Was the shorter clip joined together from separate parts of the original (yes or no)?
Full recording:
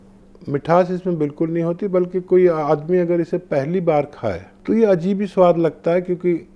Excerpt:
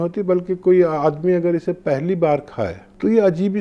no